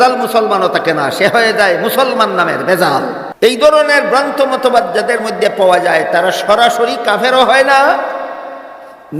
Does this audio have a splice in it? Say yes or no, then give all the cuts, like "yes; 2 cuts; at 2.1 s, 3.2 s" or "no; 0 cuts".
yes; 1 cut; at 3.2 s